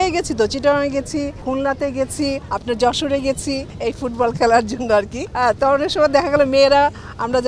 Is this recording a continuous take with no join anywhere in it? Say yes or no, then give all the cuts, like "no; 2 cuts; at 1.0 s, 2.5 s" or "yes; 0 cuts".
no; 4 cuts; at 1.4 s, 2.5 s, 3.7 s, 5.2 s